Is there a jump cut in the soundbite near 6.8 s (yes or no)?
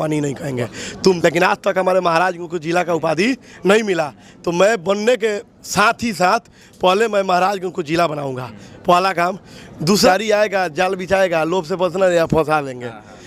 no